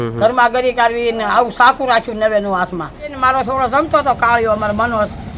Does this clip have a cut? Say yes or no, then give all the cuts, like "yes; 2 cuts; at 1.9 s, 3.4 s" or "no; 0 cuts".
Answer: yes; 1 cut; at 3.2 s